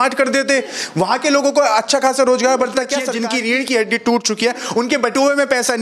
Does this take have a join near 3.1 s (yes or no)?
yes